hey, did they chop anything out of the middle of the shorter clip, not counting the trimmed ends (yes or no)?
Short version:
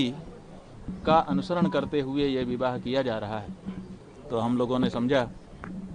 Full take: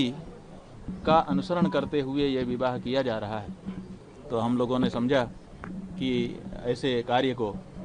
no